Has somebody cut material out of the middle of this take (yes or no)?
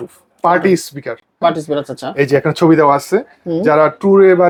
no